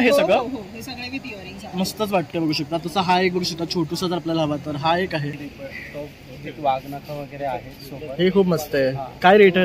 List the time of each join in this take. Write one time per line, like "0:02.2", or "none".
0:05.4